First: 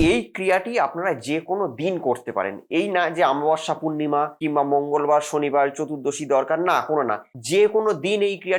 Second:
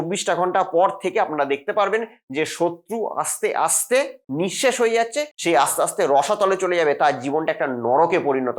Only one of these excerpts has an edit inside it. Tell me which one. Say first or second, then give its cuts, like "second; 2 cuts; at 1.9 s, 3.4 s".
second; 1 cut; at 5.3 s